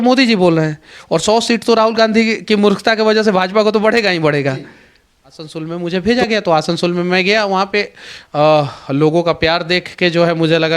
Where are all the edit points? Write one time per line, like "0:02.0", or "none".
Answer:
0:05.5